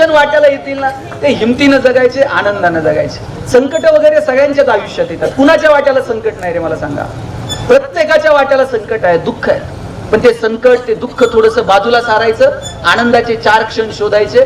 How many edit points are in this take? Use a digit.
0